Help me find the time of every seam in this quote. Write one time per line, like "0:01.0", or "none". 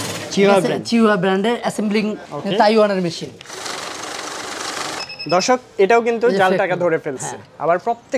0:03.4